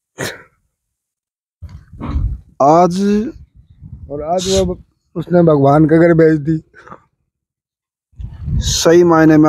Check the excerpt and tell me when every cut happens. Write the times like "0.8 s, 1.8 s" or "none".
none